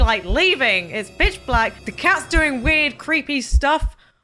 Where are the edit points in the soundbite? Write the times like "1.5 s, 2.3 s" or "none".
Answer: 1.8 s